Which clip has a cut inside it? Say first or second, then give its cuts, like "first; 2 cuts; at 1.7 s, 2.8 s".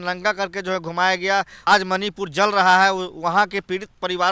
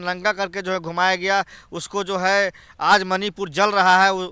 first; 1 cut; at 1.6 s